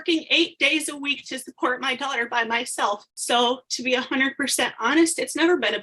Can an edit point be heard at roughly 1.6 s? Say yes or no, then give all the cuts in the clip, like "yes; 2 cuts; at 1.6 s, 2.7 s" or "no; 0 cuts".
no; 1 cut; at 3.1 s